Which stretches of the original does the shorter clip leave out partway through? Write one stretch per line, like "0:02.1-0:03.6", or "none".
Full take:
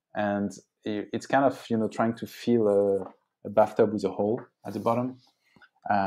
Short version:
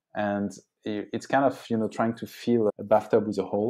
0:02.7-0:03.4